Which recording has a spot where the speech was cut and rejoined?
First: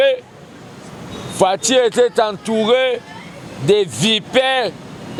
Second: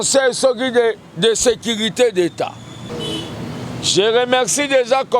second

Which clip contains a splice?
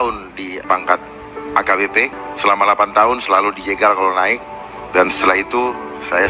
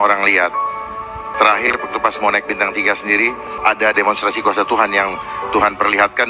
first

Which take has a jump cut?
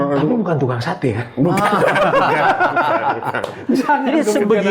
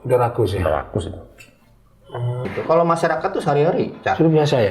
second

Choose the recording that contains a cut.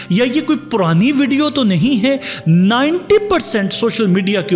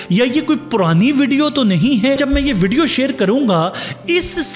second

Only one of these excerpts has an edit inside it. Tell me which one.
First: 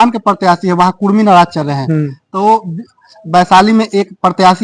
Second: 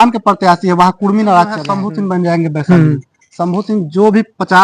second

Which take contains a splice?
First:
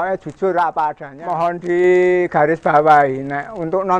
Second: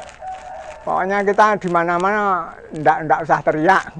first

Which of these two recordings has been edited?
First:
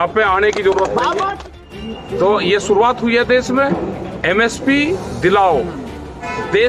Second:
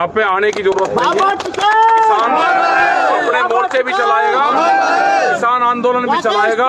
first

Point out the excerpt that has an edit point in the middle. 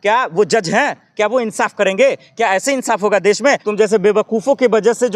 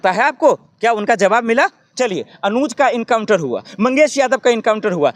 first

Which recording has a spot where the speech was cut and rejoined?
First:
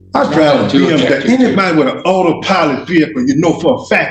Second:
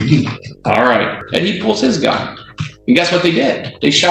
second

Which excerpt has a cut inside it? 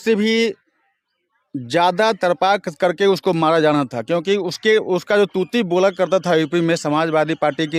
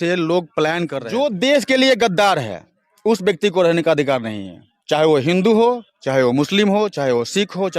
second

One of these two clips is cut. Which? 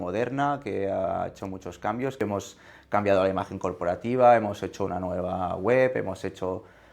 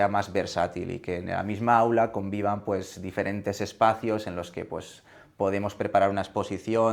first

